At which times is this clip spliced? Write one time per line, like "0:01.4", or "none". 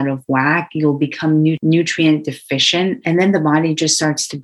0:01.6
0:03.0